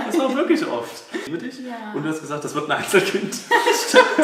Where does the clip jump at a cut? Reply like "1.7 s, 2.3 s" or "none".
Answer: 1.3 s